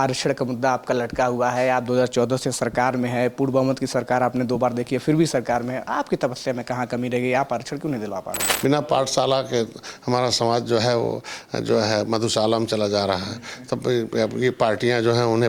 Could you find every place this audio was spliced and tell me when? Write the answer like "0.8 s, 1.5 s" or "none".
8.4 s